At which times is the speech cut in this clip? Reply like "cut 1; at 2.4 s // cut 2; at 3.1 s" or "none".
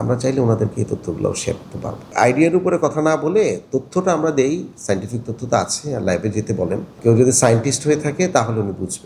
cut 1; at 2.0 s // cut 2; at 6.9 s